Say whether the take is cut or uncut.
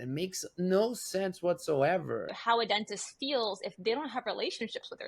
cut